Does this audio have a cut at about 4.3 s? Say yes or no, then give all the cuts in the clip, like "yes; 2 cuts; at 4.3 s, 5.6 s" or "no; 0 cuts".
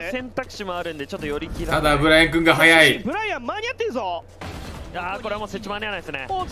yes; 1 cut; at 4.3 s